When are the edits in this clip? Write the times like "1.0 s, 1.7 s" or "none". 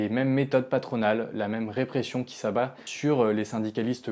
2.8 s